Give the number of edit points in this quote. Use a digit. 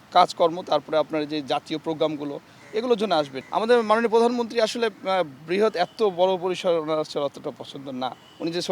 1